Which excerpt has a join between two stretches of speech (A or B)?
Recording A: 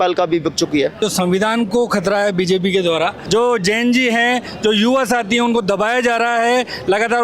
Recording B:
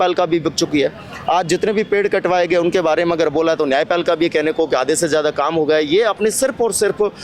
A